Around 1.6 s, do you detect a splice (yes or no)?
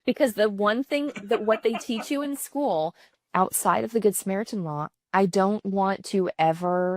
no